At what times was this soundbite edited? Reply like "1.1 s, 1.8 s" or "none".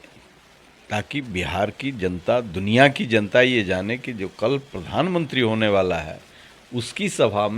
none